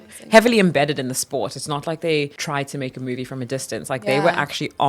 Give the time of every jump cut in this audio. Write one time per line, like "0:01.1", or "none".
0:02.4